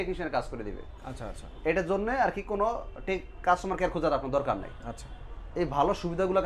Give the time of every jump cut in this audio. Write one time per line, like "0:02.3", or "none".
none